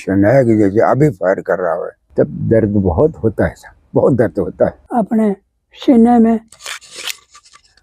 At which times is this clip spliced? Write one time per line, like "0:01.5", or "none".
0:02.0
0:04.8

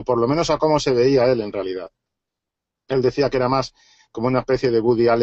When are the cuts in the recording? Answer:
none

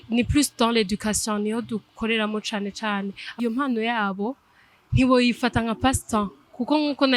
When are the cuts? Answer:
0:03.4

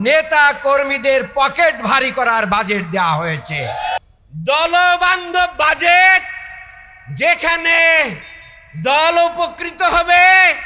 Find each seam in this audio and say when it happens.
0:04.0

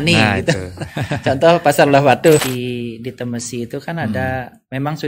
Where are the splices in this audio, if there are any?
0:02.4

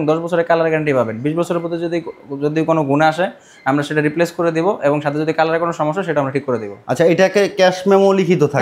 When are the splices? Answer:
none

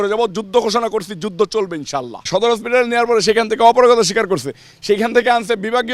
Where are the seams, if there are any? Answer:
0:02.3

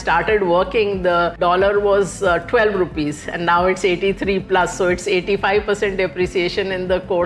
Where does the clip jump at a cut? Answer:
0:01.4

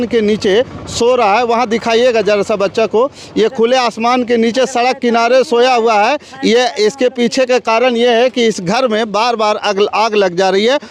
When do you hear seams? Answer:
none

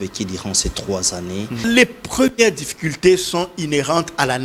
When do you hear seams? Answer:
0:01.6

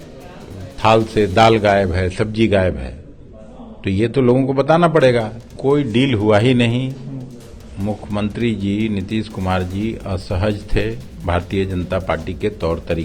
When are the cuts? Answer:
0:05.4

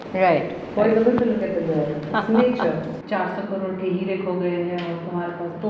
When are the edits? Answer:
0:03.0

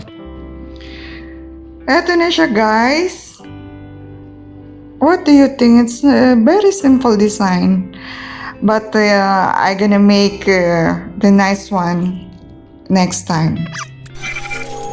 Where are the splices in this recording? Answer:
0:13.9

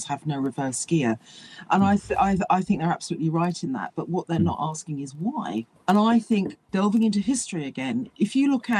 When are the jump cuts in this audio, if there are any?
0:05.7
0:06.6

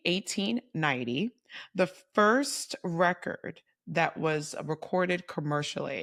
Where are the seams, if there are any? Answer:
none

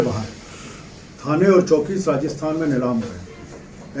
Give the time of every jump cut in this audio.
none

